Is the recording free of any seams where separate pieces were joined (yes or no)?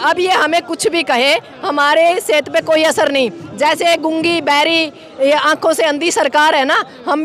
yes